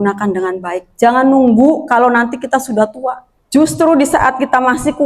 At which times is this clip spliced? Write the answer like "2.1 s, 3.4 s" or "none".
3.3 s